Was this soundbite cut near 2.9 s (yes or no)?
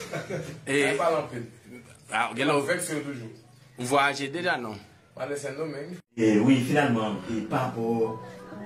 no